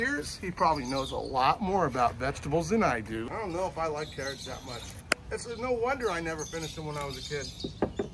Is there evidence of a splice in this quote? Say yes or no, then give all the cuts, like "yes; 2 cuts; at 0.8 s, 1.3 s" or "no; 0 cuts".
yes; 1 cut; at 3.3 s